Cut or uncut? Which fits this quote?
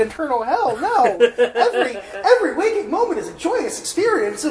uncut